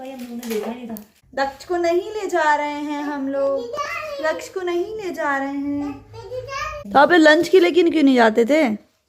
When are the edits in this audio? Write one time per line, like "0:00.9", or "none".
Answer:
0:01.1
0:06.7